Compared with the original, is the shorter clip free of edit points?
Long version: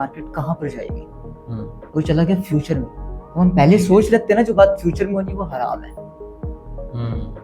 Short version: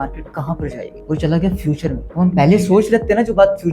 no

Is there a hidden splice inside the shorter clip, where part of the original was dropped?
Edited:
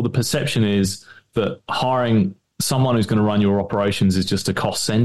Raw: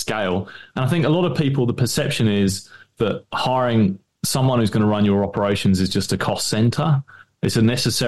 no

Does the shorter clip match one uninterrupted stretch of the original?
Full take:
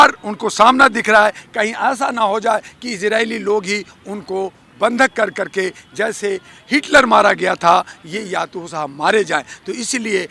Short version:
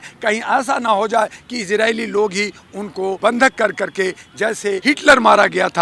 no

